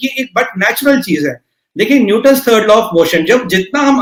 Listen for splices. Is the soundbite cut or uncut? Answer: uncut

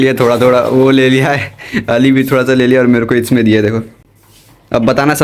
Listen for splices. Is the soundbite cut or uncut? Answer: uncut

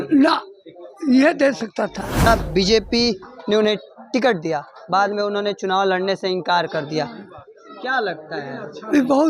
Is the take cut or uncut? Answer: cut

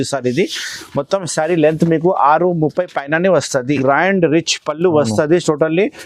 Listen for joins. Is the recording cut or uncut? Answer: cut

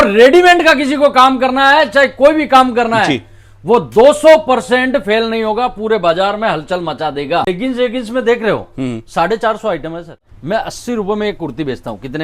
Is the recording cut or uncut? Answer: cut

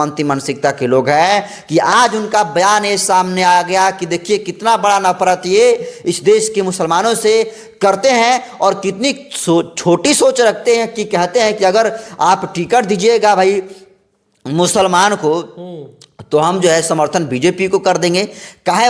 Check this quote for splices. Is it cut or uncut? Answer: uncut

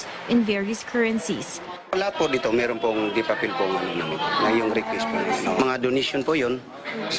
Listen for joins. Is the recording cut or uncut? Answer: uncut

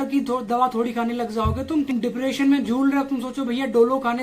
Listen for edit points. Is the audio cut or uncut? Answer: cut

